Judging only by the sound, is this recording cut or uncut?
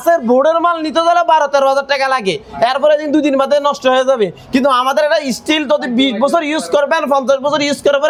uncut